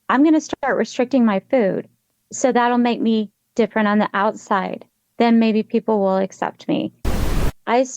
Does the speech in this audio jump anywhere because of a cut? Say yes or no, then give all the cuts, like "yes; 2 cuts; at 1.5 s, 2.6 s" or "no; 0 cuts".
yes; 1 cut; at 7.0 s